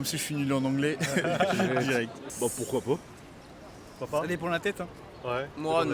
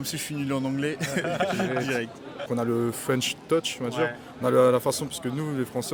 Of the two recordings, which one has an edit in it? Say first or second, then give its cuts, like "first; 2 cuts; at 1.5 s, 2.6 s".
first; 1 cut; at 2.2 s